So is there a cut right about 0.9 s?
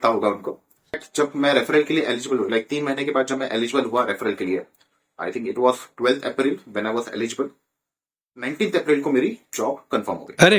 yes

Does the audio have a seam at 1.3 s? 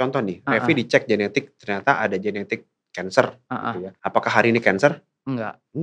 no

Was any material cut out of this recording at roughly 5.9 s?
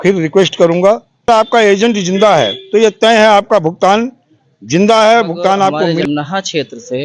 yes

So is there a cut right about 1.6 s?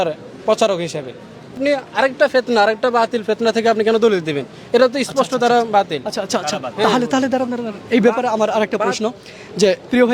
yes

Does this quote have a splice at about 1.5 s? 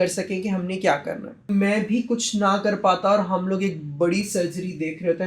yes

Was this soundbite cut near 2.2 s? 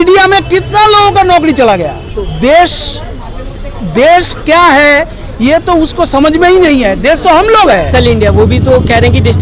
yes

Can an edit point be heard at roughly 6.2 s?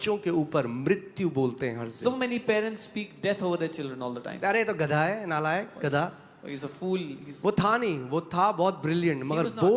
no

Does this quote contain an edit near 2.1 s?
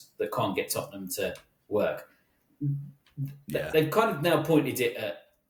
no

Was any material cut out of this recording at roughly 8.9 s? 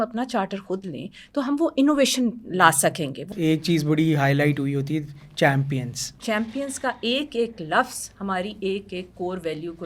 no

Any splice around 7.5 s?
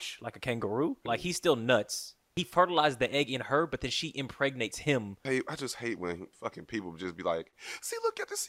no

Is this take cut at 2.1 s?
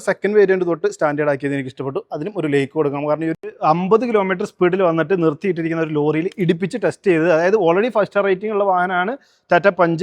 no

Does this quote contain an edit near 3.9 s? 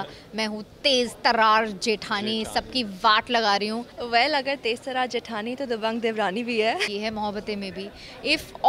yes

